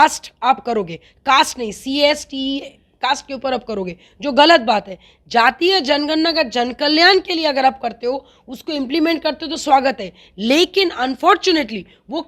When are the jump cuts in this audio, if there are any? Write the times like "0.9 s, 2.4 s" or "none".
none